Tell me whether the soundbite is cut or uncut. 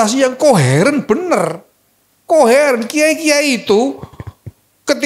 uncut